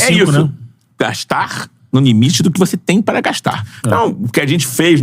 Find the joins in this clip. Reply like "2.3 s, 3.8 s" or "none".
3.7 s